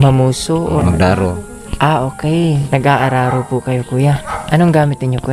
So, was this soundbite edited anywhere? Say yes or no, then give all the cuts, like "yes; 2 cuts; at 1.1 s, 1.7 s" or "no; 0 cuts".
yes; 2 cuts; at 0.8 s, 2.6 s